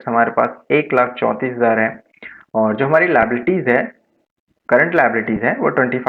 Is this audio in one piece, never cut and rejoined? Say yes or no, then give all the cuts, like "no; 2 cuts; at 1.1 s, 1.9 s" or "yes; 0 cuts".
yes; 0 cuts